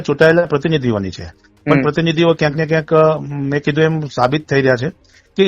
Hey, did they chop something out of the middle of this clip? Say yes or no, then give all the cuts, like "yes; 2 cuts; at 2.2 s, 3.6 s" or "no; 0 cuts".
no; 0 cuts